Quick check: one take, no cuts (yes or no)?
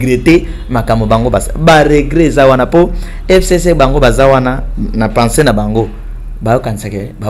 yes